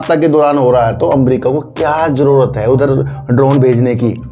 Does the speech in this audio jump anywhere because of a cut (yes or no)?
no